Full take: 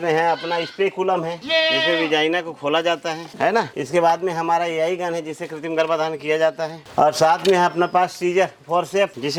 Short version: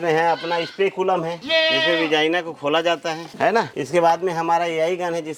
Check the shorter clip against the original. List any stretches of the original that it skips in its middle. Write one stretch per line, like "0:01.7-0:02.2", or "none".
none